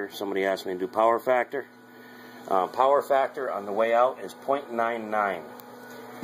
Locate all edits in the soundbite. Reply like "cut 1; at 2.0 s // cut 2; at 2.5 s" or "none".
cut 1; at 1.3 s